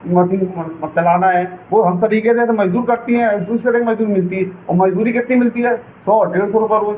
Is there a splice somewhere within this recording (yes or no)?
no